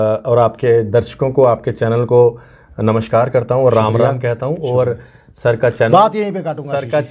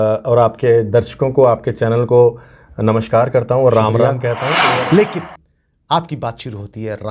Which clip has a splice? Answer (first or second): second